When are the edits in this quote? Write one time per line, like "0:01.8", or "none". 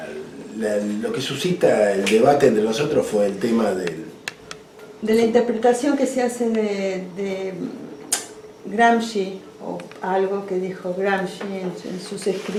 none